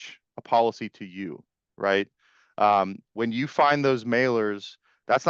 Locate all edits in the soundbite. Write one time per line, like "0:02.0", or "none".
none